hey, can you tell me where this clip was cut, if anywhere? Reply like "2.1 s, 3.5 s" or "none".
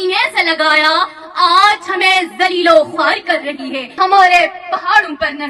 3.8 s